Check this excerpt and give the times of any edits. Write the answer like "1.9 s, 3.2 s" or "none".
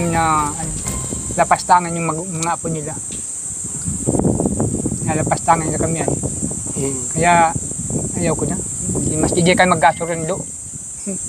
none